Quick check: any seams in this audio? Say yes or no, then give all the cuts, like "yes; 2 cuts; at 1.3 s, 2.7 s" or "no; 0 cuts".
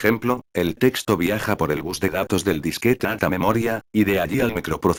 no; 0 cuts